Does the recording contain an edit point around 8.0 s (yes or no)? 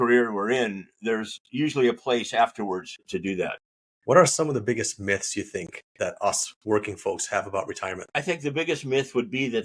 yes